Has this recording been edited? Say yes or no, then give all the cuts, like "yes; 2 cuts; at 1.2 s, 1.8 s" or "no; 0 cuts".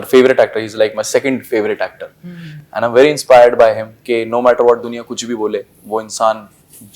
no; 0 cuts